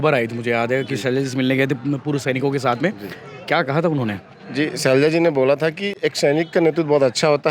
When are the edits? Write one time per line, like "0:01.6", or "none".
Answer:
none